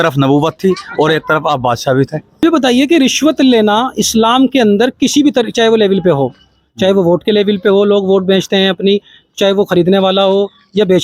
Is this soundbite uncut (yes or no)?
no